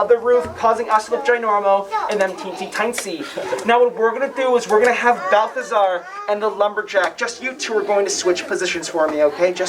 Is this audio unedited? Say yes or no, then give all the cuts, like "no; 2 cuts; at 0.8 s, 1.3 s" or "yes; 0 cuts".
yes; 0 cuts